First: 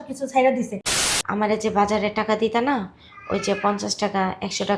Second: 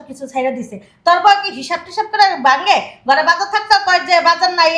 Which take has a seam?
first; 1 cut; at 0.9 s

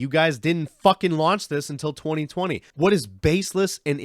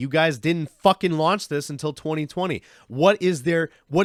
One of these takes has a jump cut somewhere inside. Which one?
first; 1 cut; at 2.7 s

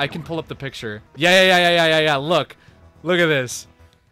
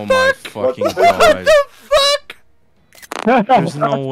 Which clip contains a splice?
first; 1 cut; at 1.1 s

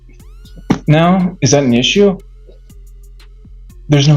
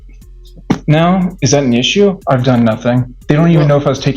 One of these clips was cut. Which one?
second; 2 cuts; at 2.2 s, 3.1 s

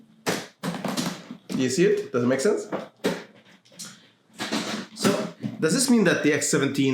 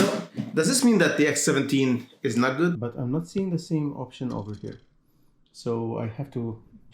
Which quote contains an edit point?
second; 1 cut; at 2.8 s

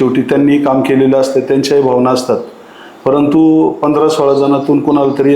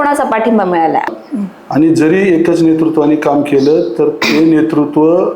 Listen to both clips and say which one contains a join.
second; 1 cut; at 1.1 s

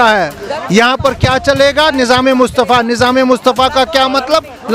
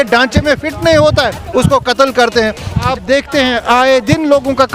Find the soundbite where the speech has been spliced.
second; 1 cut; at 2.9 s

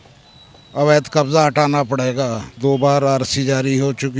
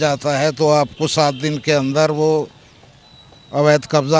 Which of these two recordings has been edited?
first; 1 cut; at 2.5 s

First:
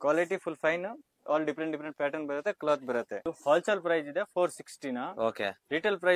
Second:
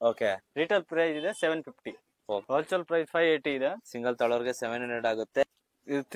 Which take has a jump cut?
second; 3 cuts; at 2.4 s, 3.9 s, 5.4 s

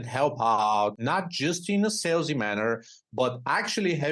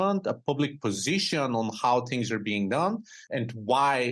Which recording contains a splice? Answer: first; 1 cut; at 1.0 s

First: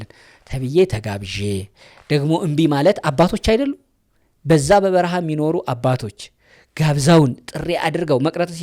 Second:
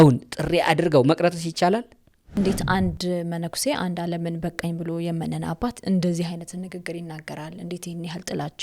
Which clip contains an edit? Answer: second; 1 cut; at 2.4 s

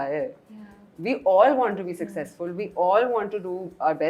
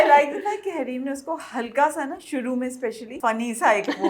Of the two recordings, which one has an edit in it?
second; 1 cut; at 3.1 s

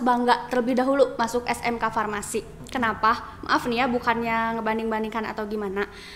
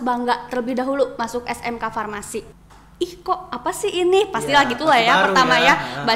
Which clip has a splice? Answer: second; 1 cut; at 2.6 s

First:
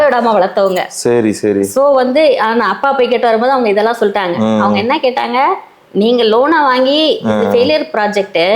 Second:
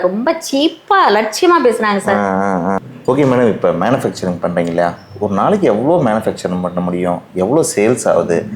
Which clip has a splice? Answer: second; 1 cut; at 2.8 s

